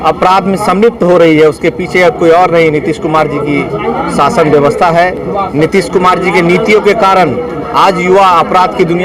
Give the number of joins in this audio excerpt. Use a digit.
0